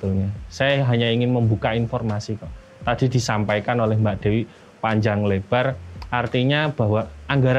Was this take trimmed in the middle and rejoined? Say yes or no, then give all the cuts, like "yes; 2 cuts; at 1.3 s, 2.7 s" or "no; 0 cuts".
no; 0 cuts